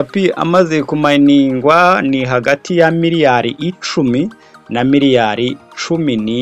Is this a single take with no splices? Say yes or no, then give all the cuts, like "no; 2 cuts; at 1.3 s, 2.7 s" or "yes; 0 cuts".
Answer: yes; 0 cuts